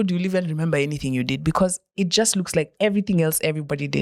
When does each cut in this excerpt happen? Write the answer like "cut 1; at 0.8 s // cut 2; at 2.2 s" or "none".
none